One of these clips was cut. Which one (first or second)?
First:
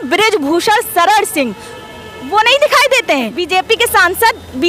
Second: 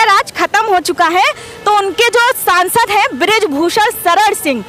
first